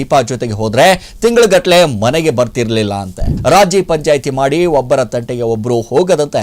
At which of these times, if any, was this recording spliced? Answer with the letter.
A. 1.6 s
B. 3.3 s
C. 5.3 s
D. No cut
B